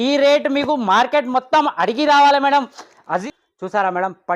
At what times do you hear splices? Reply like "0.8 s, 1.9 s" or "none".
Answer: 3.2 s